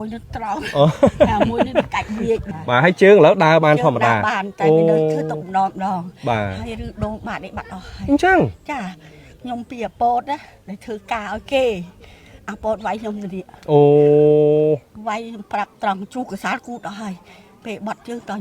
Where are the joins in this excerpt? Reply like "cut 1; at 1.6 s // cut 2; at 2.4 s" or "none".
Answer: cut 1; at 2.5 s